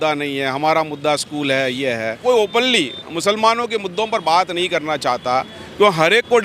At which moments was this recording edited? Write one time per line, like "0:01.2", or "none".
0:02.2